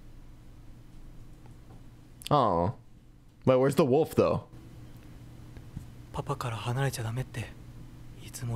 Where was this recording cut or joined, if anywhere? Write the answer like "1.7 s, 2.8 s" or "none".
none

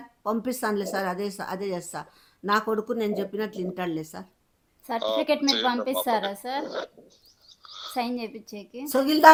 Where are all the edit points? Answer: none

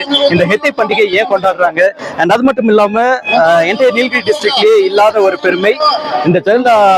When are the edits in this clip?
none

